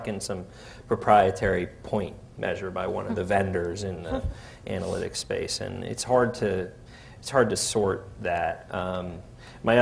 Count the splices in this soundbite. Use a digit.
1